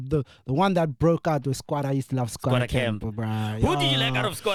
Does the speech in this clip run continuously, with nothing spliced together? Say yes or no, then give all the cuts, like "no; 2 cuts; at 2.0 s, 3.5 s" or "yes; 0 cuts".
yes; 0 cuts